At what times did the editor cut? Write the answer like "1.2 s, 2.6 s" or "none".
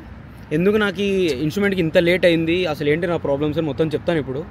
none